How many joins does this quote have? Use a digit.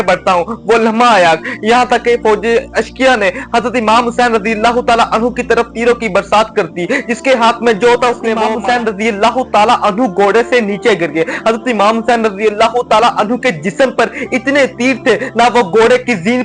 1